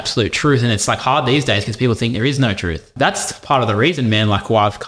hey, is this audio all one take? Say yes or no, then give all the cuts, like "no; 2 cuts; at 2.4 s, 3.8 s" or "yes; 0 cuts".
no; 1 cut; at 2.9 s